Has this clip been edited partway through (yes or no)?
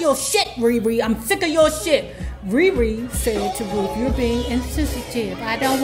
no